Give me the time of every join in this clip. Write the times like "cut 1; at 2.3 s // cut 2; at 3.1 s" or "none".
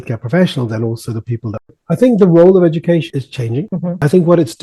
cut 1; at 1.8 s